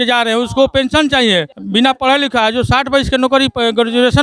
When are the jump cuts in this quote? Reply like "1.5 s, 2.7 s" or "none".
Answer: 1.6 s